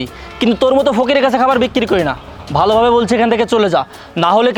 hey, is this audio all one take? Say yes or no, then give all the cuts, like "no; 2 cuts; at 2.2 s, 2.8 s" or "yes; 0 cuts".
yes; 0 cuts